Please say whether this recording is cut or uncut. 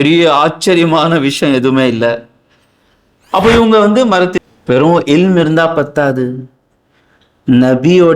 cut